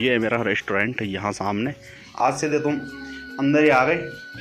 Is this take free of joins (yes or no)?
no